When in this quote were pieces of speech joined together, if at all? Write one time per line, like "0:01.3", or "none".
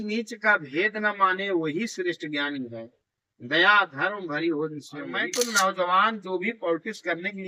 0:05.3